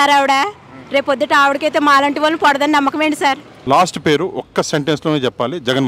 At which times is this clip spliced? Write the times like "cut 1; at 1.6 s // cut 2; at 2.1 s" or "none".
cut 1; at 3.5 s